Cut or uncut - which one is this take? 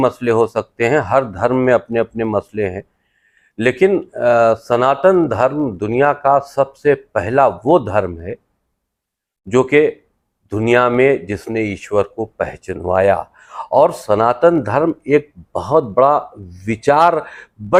uncut